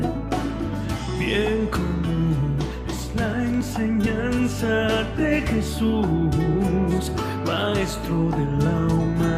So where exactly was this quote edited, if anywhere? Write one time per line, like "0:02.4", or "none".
none